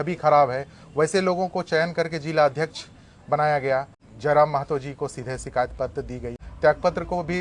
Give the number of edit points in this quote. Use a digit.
2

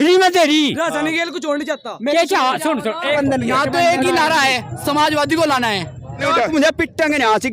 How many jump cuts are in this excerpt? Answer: 2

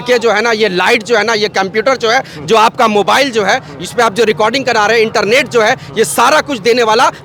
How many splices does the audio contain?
0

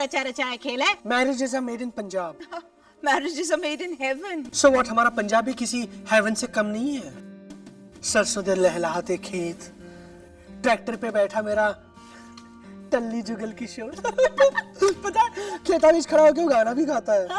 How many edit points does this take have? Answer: 1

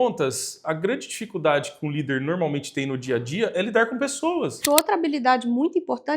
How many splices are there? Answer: 1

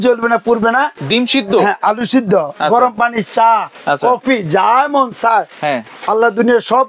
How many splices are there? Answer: 1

